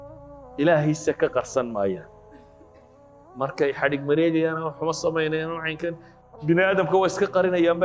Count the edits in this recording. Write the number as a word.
one